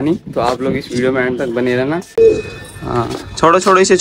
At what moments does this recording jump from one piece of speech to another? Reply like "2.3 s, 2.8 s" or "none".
2.1 s